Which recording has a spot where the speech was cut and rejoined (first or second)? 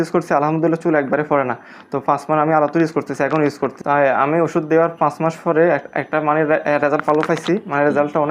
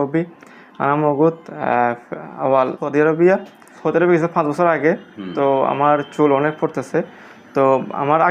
second